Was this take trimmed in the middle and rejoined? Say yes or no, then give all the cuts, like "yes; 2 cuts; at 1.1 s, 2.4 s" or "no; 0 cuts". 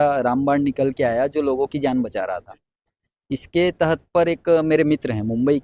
no; 0 cuts